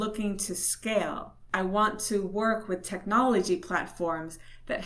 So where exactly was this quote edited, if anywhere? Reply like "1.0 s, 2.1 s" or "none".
1.3 s